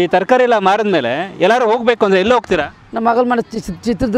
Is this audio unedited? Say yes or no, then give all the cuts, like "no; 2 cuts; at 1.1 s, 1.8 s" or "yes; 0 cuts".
no; 1 cut; at 2.8 s